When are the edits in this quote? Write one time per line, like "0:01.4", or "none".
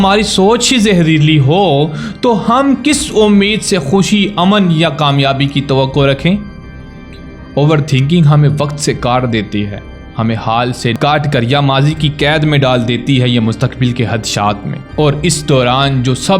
none